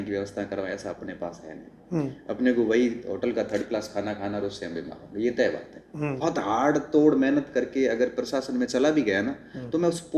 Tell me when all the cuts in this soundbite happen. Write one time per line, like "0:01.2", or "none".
0:06.2